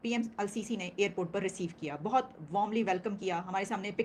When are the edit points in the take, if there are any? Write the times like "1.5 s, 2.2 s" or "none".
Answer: none